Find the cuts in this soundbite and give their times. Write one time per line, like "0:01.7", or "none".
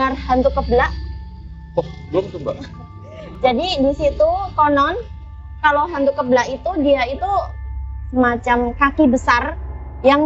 0:07.8